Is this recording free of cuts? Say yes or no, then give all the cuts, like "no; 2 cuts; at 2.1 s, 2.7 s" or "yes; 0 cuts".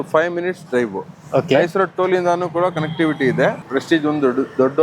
no; 1 cut; at 3.6 s